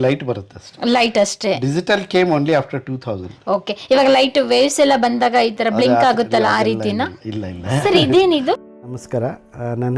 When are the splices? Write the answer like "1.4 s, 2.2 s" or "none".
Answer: 8.7 s